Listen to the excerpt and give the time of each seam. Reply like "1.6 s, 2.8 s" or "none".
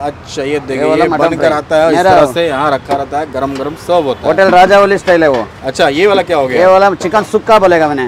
none